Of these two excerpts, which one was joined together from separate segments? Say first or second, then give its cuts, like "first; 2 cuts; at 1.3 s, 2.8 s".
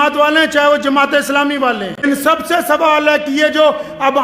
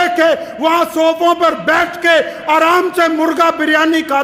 first; 1 cut; at 2.0 s